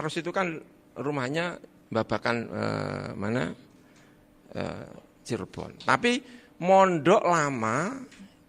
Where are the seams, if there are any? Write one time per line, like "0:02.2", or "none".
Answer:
0:01.7